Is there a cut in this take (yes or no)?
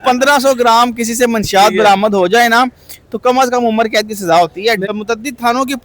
yes